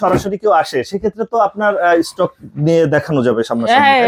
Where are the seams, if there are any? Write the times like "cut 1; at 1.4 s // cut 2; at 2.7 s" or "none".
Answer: none